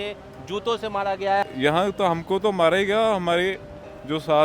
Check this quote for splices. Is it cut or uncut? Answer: cut